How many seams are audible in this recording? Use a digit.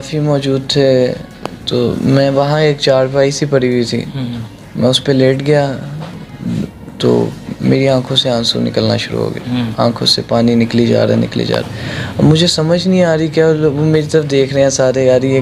0